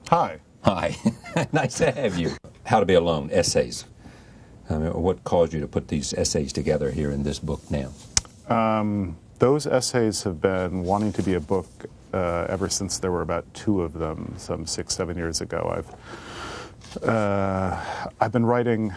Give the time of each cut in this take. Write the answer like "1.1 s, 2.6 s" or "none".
1.0 s

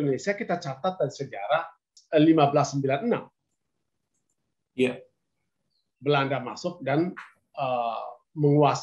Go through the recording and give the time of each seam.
1.9 s

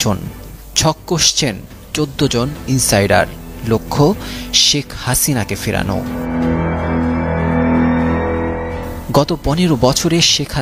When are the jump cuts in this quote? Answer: none

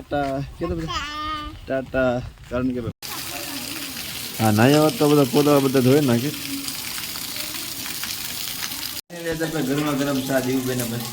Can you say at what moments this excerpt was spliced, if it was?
3.0 s, 9.0 s

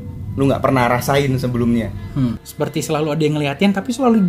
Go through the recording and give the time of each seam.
2.4 s

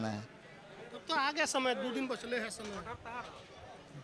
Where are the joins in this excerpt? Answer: none

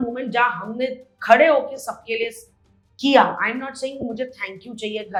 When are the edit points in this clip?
none

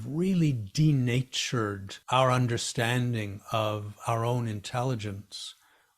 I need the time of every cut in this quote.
1.9 s

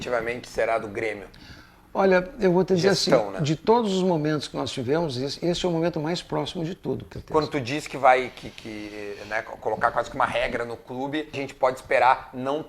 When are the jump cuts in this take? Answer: 7.1 s, 11.4 s

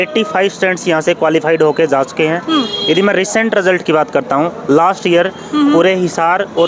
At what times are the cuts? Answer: none

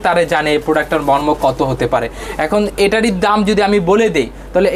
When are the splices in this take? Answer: none

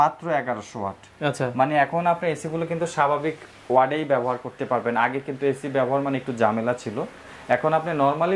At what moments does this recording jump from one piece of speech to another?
none

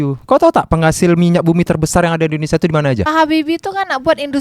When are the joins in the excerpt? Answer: 3.1 s

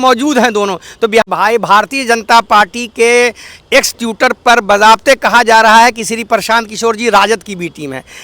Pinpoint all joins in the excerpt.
1.2 s

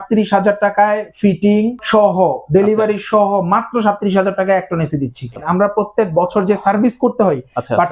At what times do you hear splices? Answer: 1.8 s, 5.4 s

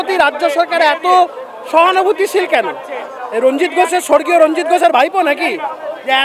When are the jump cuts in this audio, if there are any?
none

